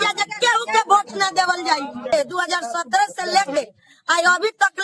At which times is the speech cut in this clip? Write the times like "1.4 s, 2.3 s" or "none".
2.0 s